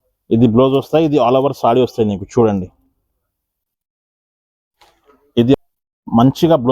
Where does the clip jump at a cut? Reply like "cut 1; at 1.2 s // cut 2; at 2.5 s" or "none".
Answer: cut 1; at 5.6 s